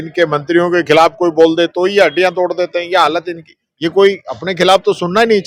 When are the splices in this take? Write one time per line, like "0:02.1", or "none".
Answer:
none